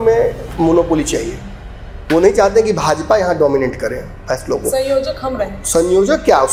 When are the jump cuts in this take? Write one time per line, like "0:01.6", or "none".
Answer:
none